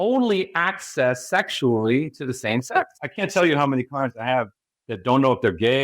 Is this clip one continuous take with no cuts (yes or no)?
no